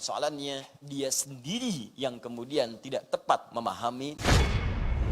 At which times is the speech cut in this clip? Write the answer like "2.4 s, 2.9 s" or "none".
4.2 s

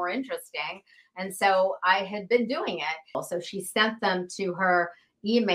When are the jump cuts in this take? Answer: 3.2 s

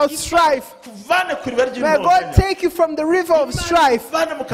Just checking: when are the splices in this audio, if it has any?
none

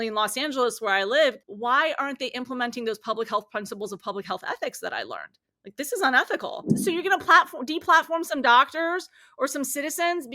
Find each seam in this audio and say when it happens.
1.5 s, 6.7 s

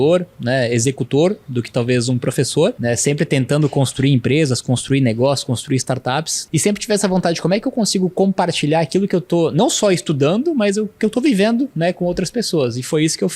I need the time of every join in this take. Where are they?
2.8 s, 6.4 s

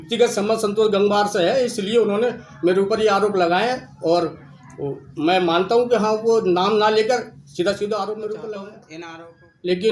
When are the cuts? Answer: 8.9 s

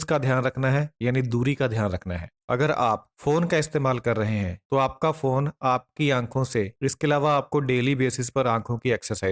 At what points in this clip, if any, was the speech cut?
6.7 s

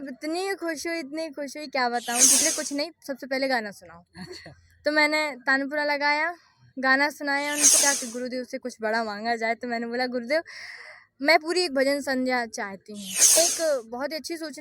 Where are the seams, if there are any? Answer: 2.4 s, 7.7 s, 13.4 s

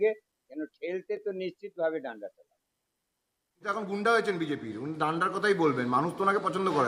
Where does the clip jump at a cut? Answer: 3.6 s

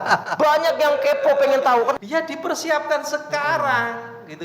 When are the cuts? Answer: 2.0 s

